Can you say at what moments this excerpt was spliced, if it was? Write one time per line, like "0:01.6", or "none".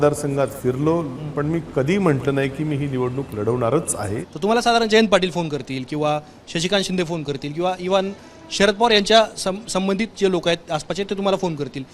0:04.2